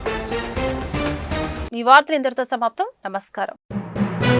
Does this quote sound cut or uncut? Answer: uncut